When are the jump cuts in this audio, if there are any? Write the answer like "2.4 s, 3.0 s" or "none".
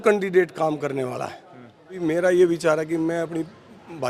1.9 s